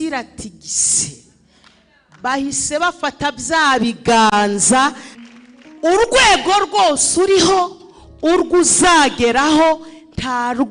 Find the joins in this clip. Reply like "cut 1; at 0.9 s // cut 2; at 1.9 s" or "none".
cut 1; at 5.1 s